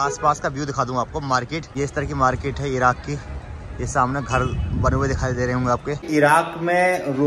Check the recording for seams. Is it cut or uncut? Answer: cut